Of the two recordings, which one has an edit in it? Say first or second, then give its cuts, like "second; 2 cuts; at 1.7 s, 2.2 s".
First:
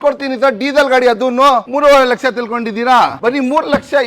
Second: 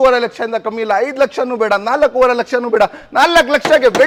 first; 2 cuts; at 1.7 s, 3.2 s